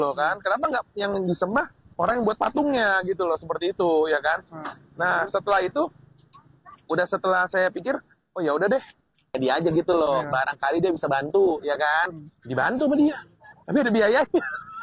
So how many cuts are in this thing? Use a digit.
1